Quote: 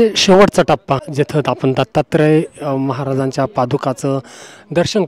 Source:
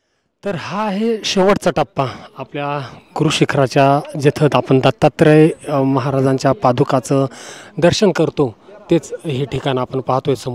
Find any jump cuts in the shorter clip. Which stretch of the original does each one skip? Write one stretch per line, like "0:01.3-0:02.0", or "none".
0:02.1-0:04.1